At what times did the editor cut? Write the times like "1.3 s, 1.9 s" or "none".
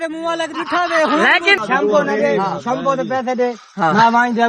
1.6 s